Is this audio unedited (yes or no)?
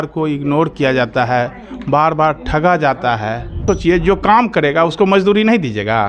no